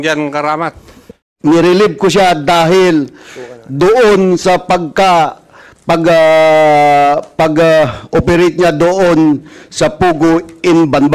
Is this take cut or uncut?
cut